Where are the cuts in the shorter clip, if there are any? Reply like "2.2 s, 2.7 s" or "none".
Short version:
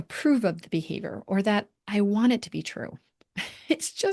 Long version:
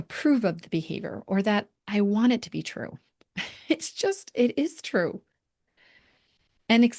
none